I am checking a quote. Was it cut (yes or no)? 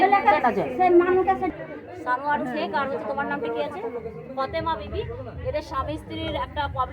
yes